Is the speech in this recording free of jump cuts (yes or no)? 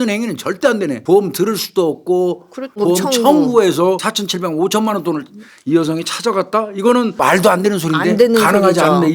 no